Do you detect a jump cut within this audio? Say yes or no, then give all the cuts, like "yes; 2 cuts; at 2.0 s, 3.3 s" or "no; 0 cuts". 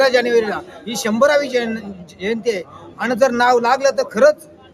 no; 0 cuts